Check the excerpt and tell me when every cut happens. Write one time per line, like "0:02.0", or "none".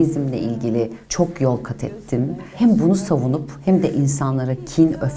0:01.0
0:02.4